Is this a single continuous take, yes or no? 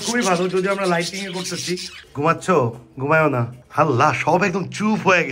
yes